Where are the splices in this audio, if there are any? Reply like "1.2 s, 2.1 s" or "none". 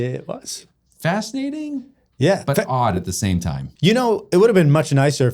3.6 s